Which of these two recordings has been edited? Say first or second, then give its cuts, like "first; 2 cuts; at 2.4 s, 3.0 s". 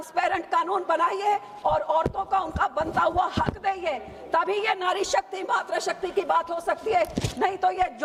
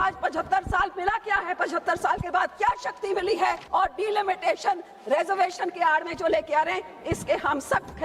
second; 1 cut; at 3.6 s